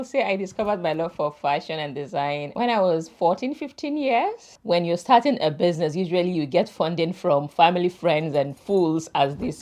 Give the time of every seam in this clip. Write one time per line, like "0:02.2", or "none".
0:02.5
0:04.5